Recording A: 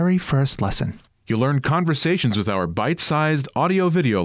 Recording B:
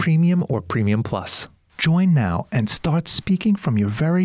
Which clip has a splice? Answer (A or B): B